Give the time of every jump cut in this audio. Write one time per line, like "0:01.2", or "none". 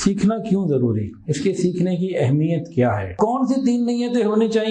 0:03.1